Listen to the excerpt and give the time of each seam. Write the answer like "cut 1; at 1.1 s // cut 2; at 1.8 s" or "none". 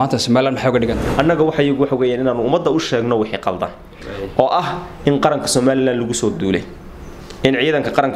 cut 1; at 1.0 s